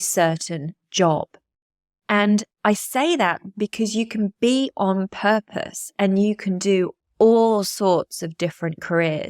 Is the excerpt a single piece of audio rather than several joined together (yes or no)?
no